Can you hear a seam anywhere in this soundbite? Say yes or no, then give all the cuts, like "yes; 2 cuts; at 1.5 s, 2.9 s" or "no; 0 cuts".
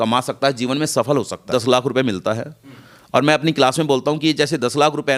yes; 1 cut; at 1.4 s